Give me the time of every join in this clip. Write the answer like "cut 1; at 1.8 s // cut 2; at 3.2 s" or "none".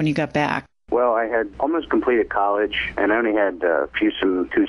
cut 1; at 1.1 s